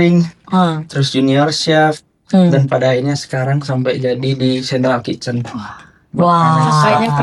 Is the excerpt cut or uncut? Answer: uncut